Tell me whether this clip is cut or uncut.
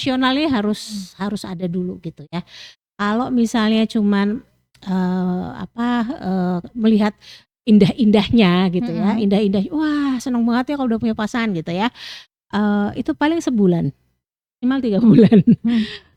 uncut